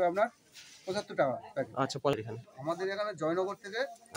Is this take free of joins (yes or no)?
no